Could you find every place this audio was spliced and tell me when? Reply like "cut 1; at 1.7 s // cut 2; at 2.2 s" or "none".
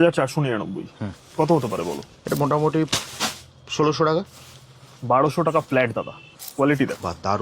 cut 1; at 2.1 s // cut 2; at 6.2 s